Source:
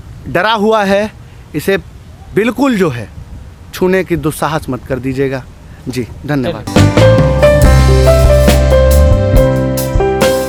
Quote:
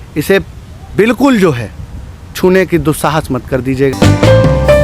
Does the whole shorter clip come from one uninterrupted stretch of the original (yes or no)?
no